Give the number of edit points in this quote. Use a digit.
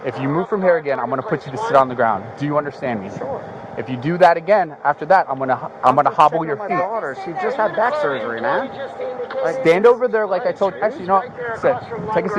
0